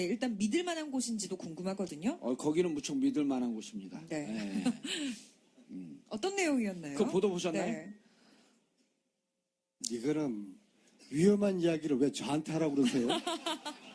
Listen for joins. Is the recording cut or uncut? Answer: uncut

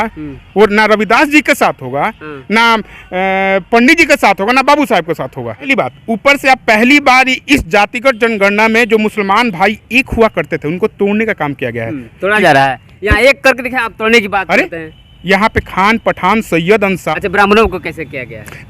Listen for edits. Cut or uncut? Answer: cut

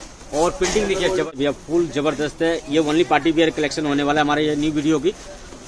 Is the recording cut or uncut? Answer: cut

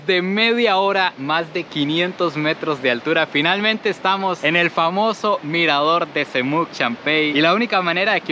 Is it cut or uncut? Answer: uncut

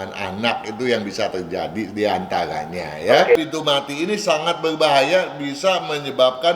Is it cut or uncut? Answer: cut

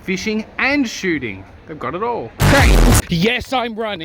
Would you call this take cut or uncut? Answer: cut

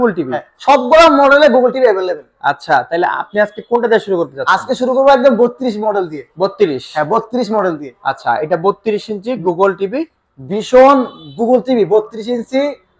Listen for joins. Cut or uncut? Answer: uncut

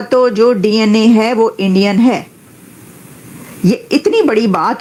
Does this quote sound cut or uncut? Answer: uncut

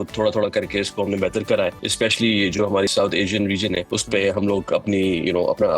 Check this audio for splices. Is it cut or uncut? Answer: cut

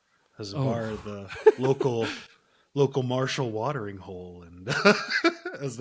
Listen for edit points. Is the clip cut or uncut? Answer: uncut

